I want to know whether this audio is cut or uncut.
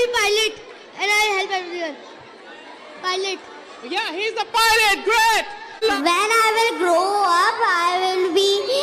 cut